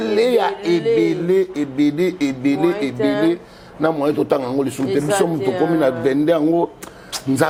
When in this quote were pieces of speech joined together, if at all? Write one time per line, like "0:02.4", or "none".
none